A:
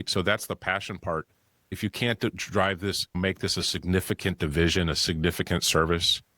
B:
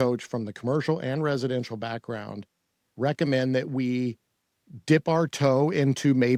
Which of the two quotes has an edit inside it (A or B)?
A